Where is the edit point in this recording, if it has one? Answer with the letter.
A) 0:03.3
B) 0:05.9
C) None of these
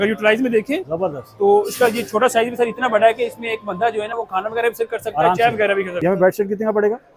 B